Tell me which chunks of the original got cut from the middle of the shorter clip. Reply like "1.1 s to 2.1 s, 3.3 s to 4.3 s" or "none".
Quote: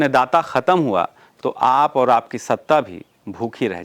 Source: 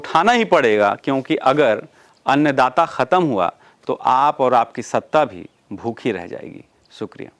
none